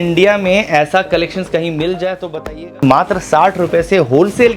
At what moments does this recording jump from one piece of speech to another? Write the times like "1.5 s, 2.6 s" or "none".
2.7 s